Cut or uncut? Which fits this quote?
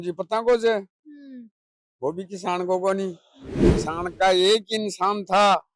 cut